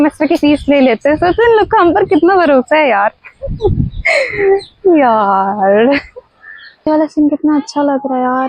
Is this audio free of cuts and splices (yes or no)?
no